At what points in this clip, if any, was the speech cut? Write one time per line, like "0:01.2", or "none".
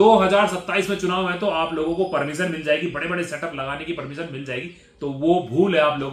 none